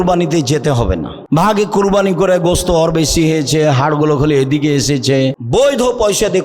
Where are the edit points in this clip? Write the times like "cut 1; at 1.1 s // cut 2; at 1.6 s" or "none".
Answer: cut 1; at 1.1 s // cut 2; at 5.4 s